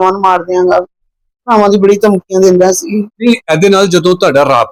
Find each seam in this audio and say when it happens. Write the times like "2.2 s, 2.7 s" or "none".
none